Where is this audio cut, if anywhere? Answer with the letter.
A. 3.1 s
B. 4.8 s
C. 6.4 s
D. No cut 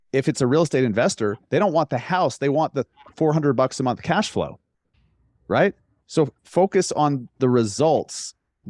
C